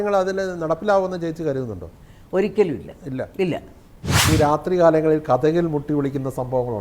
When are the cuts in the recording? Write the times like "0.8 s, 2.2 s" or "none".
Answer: 4.3 s

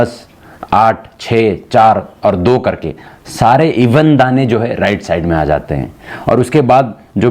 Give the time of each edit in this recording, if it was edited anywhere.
none

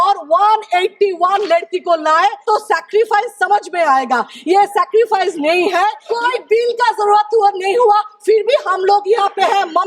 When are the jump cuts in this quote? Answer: 2.4 s, 6.0 s

